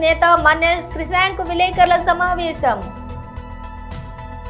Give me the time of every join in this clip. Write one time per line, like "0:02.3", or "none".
none